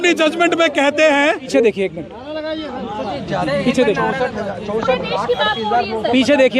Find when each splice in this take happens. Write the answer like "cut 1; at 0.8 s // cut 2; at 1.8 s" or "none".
cut 1; at 1.5 s

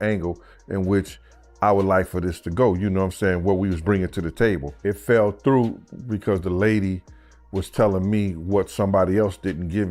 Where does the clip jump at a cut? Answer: cut 1; at 4.8 s

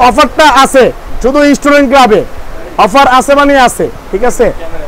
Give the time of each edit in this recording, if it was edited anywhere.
none

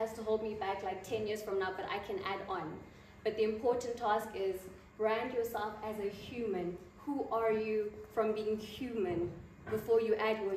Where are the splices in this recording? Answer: none

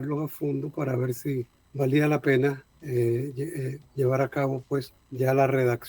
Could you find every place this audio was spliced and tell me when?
cut 1; at 1.6 s // cut 2; at 2.7 s // cut 3; at 5.0 s

